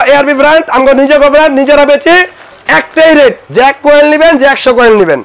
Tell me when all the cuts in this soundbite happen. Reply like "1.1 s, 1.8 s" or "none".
3.4 s